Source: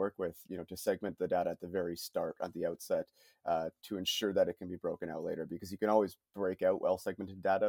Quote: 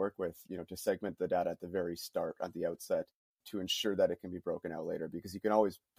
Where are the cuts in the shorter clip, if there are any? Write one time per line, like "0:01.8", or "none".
0:03.4